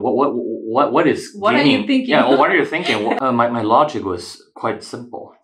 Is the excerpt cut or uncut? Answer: cut